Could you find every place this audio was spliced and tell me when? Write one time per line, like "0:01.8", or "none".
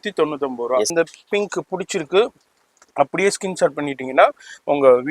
0:00.9